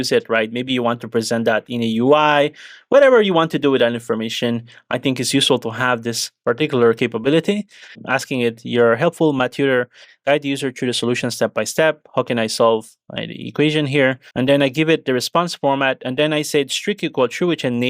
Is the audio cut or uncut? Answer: uncut